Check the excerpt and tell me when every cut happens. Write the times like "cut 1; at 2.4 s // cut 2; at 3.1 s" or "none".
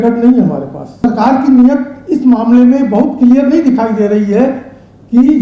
cut 1; at 1.0 s